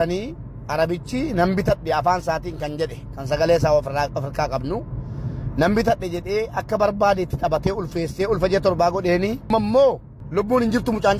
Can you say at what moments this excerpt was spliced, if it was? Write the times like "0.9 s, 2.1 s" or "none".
9.5 s, 10.1 s